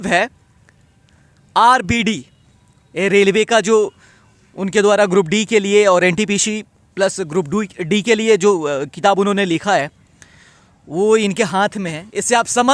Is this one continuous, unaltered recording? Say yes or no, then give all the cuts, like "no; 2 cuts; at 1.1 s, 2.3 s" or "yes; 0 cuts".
yes; 0 cuts